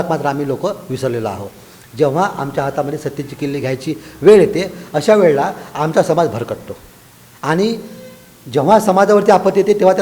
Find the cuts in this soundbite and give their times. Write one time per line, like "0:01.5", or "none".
none